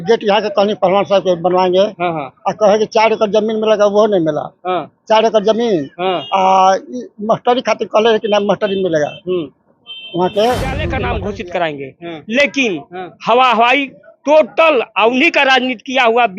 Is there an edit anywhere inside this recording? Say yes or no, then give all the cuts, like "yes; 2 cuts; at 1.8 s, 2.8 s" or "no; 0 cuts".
yes; 1 cut; at 10.9 s